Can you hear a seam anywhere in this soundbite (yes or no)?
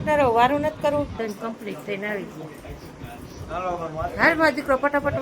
yes